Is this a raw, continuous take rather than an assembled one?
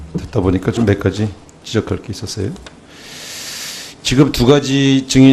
yes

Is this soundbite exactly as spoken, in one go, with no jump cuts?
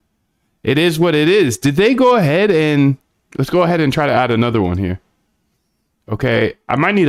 yes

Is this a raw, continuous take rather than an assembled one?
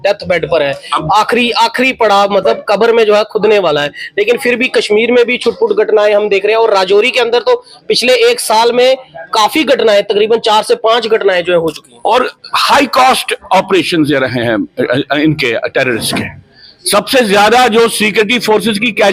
yes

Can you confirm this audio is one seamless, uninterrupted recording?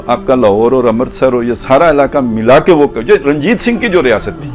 yes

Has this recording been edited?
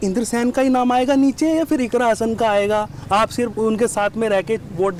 no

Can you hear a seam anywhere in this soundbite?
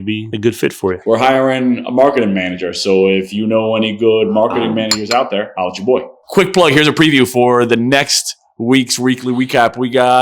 yes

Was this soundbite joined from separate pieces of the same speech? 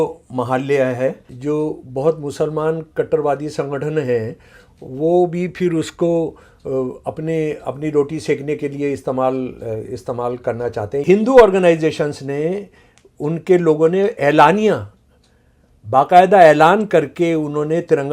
yes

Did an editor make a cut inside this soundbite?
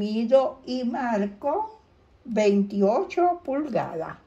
no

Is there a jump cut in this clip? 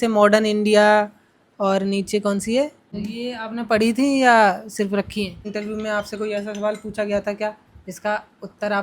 yes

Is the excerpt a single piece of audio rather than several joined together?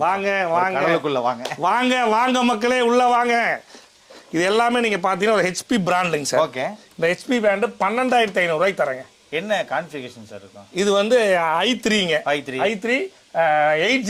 yes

